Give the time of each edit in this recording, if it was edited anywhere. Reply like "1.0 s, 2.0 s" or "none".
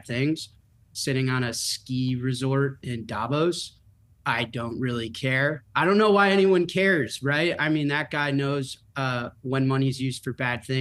5.6 s